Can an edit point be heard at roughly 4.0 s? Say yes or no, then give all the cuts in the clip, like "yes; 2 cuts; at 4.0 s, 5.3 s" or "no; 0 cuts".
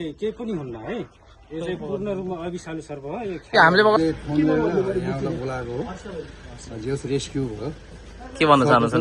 yes; 1 cut; at 4.0 s